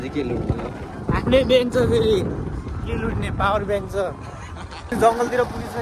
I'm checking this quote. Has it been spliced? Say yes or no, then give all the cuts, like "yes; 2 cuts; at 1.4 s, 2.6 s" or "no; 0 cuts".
yes; 1 cut; at 4.9 s